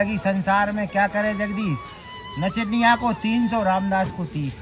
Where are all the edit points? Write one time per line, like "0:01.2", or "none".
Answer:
none